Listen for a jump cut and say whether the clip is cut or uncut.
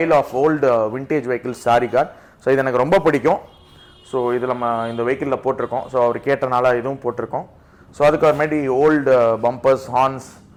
uncut